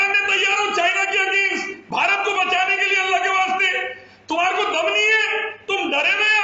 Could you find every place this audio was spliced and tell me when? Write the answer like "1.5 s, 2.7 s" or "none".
none